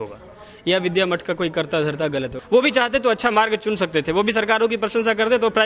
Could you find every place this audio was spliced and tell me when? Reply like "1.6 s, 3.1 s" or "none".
2.4 s